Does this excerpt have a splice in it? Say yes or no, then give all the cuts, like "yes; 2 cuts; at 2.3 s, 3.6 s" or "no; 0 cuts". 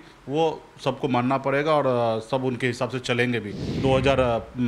yes; 1 cut; at 3.6 s